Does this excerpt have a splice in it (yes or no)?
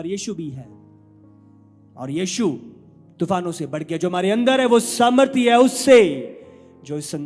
no